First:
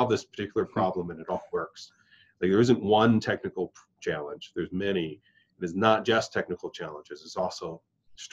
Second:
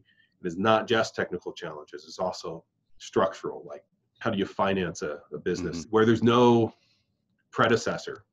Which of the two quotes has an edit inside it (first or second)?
second